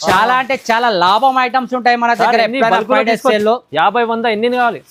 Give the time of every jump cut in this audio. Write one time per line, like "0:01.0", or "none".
none

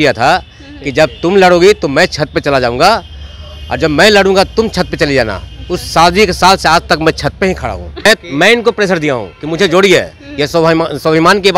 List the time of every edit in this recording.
0:08.0

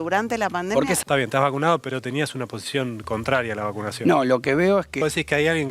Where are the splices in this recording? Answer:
0:01.0
0:05.0

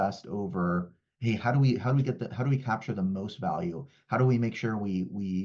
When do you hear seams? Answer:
none

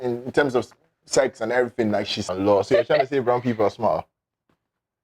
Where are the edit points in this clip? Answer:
0:02.3

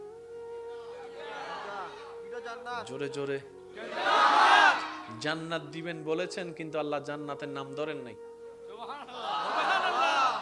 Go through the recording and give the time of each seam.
0:01.1

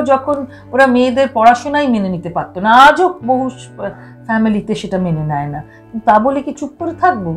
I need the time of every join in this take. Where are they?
none

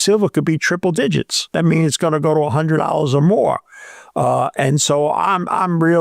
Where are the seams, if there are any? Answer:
0:01.4

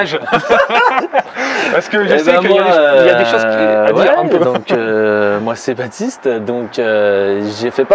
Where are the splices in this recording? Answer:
none

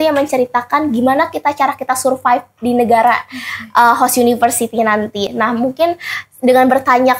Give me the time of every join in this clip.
none

